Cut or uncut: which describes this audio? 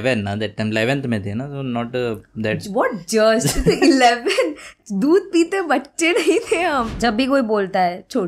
cut